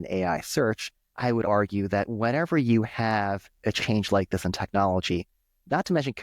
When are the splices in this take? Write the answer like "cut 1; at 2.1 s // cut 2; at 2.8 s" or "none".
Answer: cut 1; at 1.3 s